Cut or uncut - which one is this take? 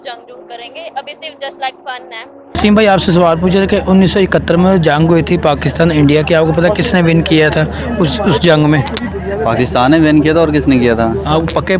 cut